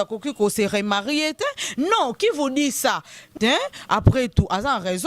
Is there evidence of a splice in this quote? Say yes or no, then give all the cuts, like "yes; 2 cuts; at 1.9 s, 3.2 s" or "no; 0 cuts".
yes; 1 cut; at 3.2 s